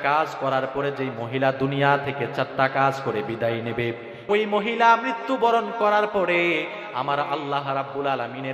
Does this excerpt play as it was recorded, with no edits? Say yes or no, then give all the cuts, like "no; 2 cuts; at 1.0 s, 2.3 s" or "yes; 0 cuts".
no; 1 cut; at 4.1 s